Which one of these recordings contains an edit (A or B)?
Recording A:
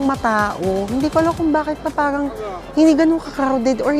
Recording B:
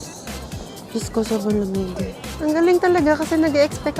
B